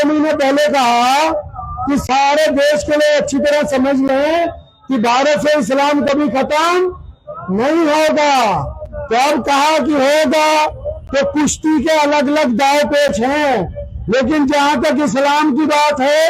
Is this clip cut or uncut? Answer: uncut